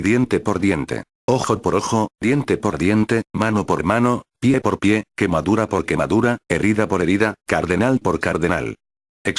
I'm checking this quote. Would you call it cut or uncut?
uncut